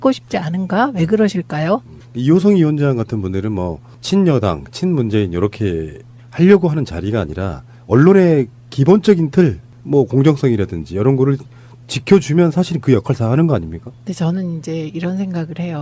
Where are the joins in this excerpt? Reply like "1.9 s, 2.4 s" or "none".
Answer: none